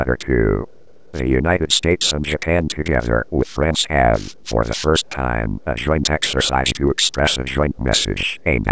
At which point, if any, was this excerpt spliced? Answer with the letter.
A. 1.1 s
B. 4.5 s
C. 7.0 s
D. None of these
D